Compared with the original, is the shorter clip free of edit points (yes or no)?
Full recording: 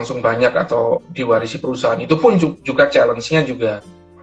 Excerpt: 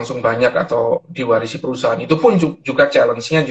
yes